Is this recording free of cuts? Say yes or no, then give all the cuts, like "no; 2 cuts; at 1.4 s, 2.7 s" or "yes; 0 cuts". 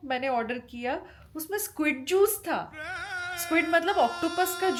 yes; 0 cuts